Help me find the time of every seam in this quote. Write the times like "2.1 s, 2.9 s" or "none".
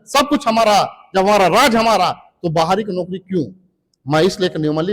none